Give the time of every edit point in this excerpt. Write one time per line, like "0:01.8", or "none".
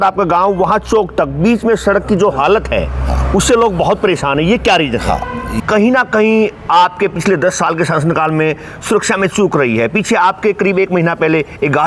0:05.5